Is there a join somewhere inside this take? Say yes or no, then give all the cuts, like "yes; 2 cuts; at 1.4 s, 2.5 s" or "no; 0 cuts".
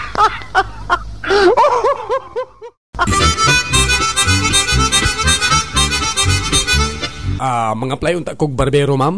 yes; 2 cuts; at 2.9 s, 7.0 s